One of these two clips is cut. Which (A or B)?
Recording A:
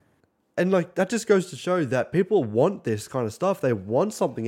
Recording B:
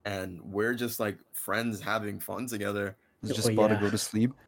B